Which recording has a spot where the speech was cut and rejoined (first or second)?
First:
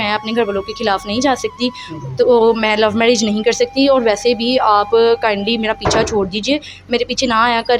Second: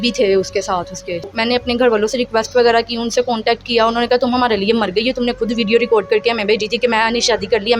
second